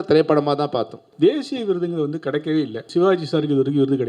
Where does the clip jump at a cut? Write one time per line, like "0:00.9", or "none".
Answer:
0:01.0
0:02.9